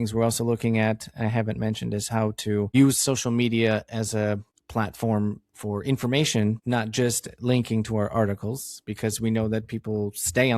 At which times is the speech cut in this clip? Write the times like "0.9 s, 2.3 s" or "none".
2.7 s, 4.5 s, 6.6 s